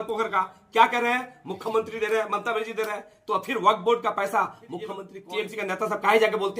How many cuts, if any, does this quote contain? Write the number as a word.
one